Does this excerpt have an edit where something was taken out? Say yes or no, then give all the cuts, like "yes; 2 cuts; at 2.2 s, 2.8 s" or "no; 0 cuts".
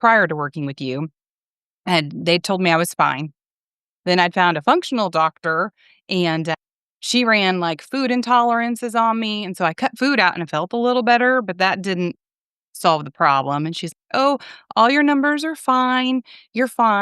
no; 0 cuts